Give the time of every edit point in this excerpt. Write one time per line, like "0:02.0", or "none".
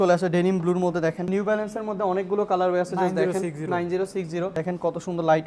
0:01.3
0:04.5